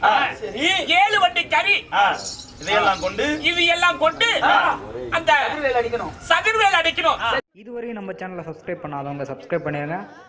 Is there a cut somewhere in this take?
yes; 1 cut; at 7.5 s

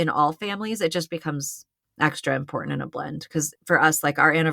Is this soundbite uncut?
no; 1 cut; at 3.5 s

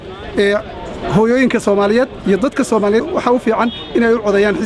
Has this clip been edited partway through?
yes; 1 cut; at 3.1 s

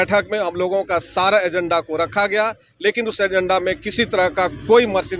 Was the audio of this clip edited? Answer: no; 0 cuts

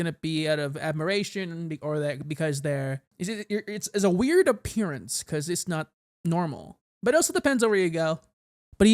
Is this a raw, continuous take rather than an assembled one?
no; 1 cut; at 3.1 s

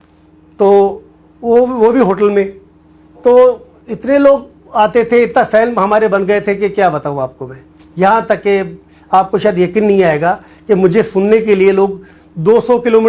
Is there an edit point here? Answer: no; 0 cuts

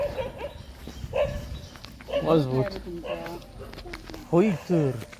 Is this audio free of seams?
yes; 0 cuts

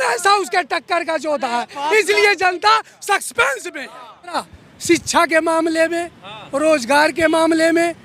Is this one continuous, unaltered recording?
no; 1 cut; at 4.4 s

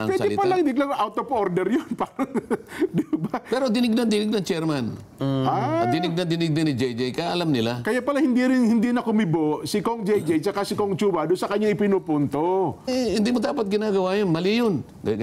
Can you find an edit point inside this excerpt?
yes; 1 cut; at 12.9 s

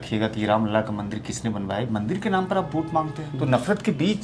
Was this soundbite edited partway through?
yes; 1 cut; at 3.2 s

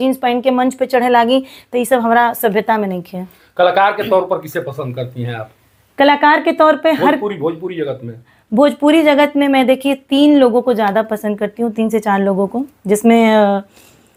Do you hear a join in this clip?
no; 0 cuts

